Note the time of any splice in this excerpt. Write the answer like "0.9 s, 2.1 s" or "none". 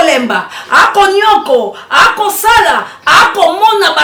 none